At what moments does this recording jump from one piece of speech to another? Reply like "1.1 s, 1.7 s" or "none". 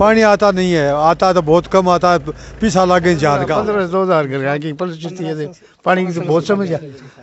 3.6 s